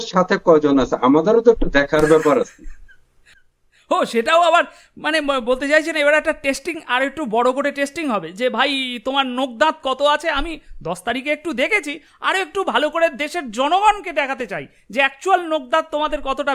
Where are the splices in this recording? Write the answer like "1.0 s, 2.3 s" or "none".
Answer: none